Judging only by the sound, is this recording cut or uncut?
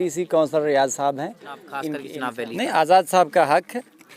cut